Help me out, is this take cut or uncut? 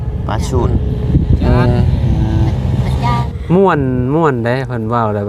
cut